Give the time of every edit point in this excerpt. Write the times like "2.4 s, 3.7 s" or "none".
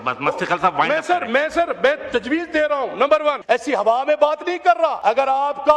3.4 s, 5.0 s